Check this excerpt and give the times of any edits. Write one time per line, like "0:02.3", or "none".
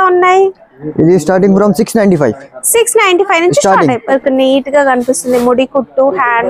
0:04.1